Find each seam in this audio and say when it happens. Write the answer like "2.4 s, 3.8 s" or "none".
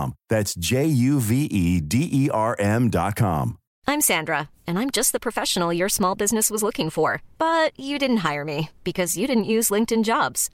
3.6 s